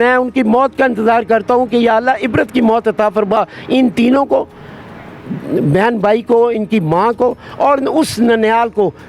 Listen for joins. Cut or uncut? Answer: uncut